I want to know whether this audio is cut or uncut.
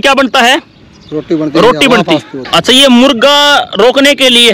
cut